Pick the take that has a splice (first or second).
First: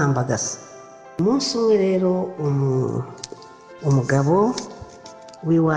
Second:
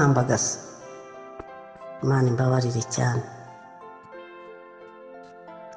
first